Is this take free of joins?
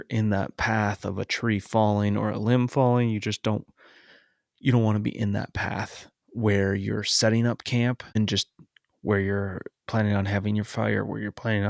no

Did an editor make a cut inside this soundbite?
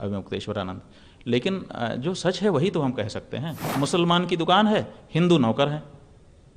yes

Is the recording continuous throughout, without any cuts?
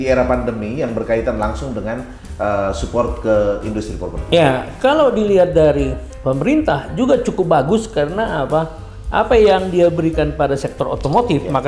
no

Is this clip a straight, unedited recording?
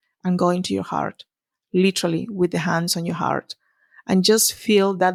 yes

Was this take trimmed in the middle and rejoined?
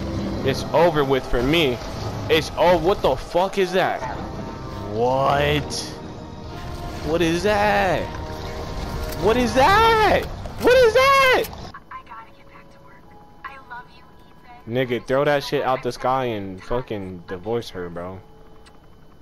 yes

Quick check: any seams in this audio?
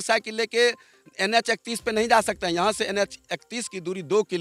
no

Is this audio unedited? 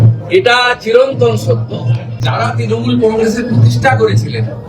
no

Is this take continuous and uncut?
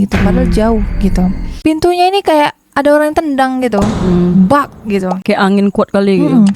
yes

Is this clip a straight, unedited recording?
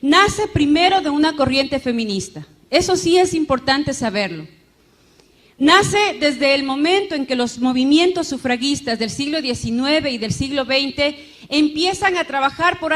no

